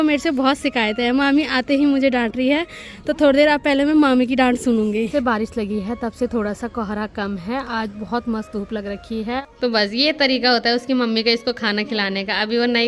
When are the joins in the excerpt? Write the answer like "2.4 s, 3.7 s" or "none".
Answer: 5.1 s, 9.4 s